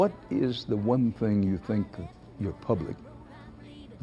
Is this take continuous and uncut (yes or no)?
yes